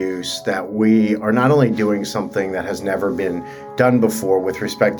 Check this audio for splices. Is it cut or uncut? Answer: uncut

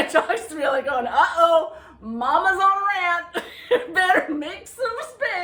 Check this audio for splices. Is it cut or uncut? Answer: uncut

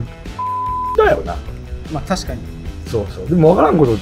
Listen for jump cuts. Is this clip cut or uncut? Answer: uncut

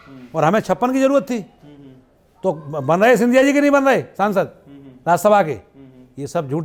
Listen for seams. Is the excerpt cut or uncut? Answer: uncut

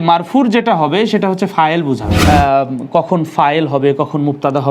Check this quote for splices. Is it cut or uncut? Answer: cut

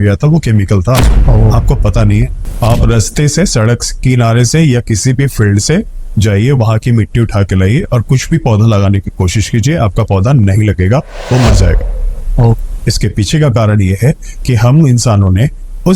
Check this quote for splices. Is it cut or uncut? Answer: cut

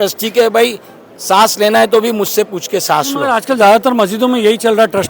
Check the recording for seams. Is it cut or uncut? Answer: uncut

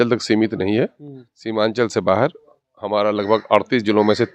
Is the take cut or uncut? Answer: uncut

